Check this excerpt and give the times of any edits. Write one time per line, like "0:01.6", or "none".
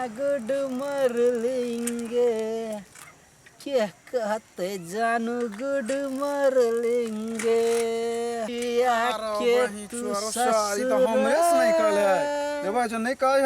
0:08.5